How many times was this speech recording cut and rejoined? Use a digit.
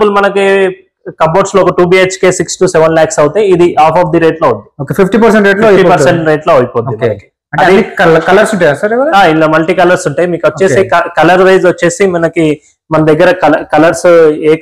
0